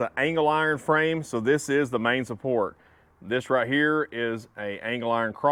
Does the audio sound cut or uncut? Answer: uncut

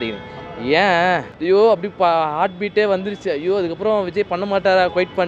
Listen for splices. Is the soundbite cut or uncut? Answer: cut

